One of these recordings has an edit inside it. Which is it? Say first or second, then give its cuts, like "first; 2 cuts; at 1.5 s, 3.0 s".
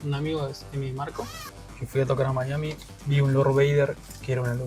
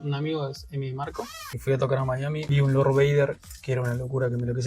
second; 2 cuts; at 1.4 s, 2.4 s